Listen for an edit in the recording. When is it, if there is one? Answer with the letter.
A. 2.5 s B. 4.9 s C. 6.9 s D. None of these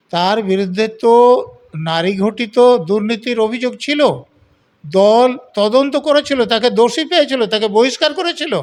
D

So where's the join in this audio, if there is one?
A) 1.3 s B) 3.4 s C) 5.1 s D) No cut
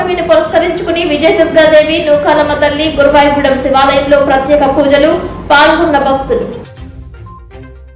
D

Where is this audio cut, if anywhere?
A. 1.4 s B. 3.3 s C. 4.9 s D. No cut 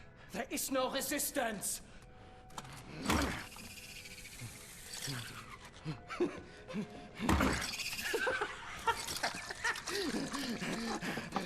B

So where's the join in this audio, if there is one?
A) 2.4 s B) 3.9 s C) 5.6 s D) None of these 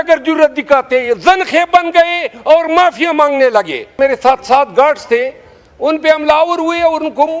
B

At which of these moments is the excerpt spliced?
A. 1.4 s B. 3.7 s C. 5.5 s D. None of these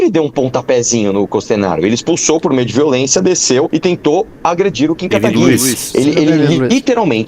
B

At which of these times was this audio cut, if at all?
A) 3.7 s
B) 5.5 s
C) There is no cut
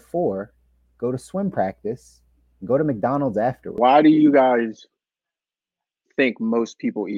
A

